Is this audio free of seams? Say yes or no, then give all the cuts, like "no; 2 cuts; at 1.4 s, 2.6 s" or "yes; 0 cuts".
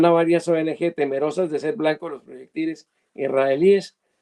yes; 0 cuts